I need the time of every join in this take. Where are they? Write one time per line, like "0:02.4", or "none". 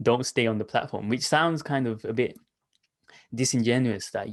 none

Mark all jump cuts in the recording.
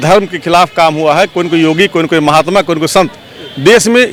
none

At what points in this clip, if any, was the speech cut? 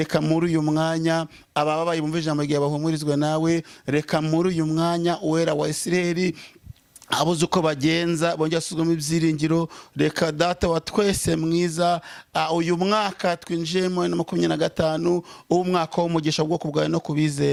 none

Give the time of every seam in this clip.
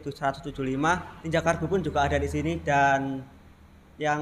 0:01.1

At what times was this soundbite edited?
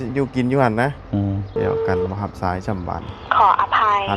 0:01.6

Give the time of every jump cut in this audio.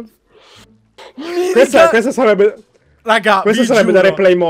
none

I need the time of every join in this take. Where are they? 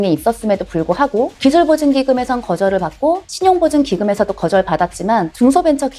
none

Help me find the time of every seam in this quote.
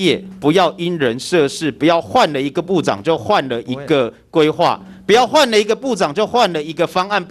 none

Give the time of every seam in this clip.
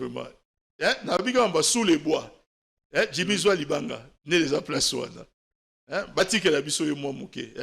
none

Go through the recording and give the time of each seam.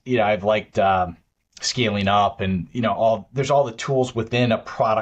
none

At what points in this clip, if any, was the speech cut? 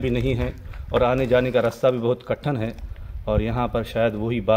none

